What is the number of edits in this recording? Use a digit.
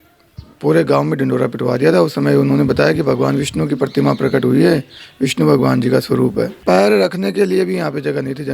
1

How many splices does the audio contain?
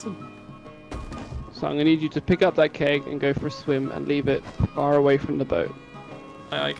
0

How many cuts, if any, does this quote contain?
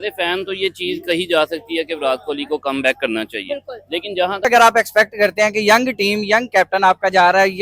1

